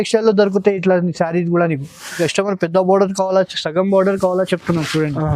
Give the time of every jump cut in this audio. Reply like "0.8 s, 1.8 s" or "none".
2.2 s